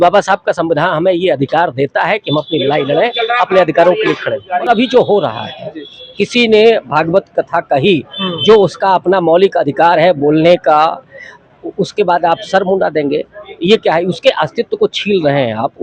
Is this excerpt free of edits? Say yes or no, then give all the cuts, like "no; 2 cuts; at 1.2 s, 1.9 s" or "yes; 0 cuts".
no; 1 cut; at 4.6 s